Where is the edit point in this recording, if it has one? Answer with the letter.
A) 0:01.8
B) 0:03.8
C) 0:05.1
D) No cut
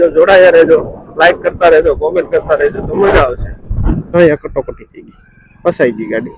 B